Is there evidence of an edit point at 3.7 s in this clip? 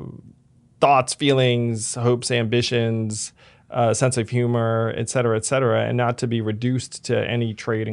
no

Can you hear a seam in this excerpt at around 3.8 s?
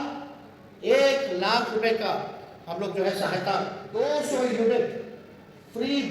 yes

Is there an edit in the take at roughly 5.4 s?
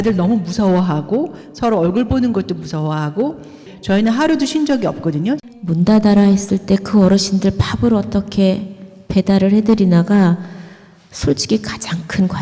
yes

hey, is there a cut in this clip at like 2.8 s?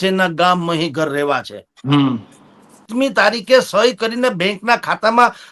yes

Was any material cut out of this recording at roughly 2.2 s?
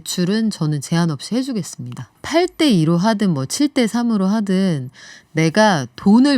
yes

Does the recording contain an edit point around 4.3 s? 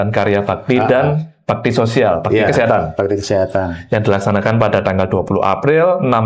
no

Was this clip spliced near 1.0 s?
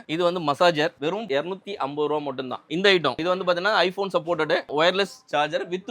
yes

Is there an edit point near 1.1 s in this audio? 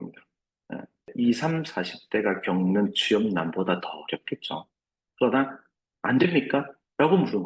yes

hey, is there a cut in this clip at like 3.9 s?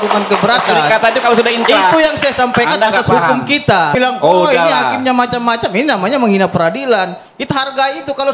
yes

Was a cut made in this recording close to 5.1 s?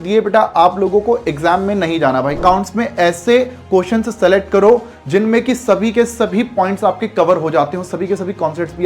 no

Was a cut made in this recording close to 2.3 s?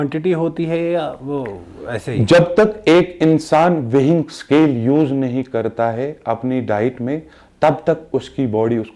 no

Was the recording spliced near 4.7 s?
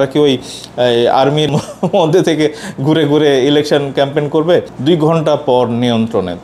yes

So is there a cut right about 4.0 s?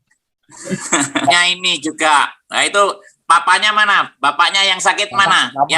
no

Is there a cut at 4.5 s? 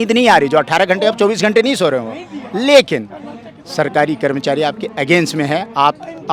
no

